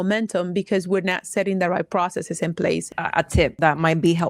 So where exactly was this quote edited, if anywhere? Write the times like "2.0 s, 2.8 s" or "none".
3.3 s